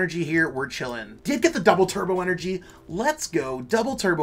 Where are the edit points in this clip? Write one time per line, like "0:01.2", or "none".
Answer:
0:01.1